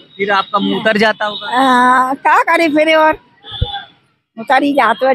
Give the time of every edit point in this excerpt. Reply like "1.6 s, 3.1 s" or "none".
none